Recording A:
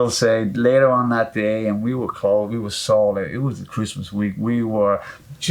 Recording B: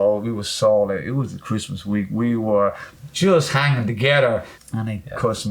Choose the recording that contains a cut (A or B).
B